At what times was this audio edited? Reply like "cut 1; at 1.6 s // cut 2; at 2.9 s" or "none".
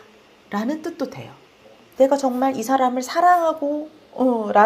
cut 1; at 1.8 s